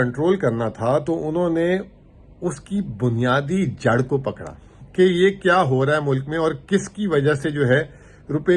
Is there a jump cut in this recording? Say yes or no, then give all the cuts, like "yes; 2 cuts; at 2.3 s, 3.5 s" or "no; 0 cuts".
no; 0 cuts